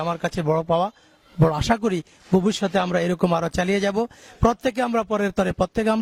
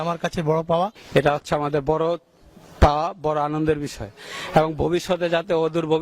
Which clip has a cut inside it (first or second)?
second